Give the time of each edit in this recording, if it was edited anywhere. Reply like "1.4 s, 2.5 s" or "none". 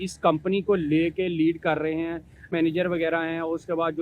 2.5 s